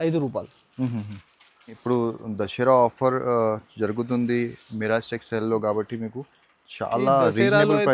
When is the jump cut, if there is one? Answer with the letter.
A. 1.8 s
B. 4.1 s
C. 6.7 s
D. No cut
A